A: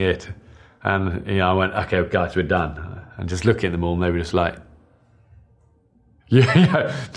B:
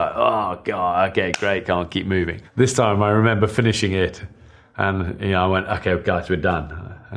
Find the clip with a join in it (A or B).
A